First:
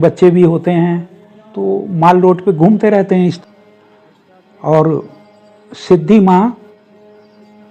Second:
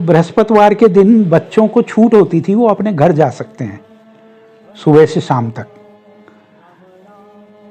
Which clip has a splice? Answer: first; 1 cut; at 3.4 s

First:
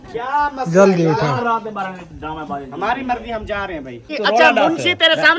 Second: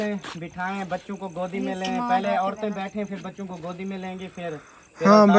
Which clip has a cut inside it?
first; 1 cut; at 4.1 s

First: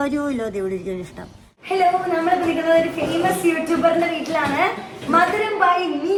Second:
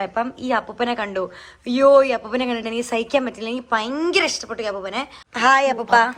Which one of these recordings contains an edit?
second; 1 cut; at 5.2 s

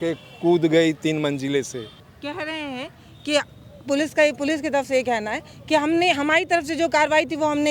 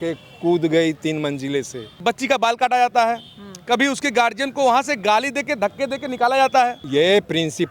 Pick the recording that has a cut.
second; 2 cuts; at 1.8 s, 6.8 s

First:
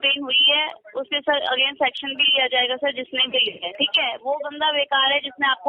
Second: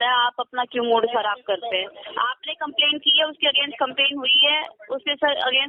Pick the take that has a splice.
first; 1 cut; at 3.6 s

